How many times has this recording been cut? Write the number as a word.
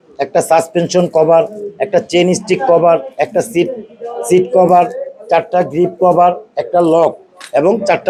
zero